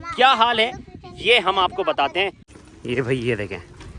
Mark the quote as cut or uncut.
cut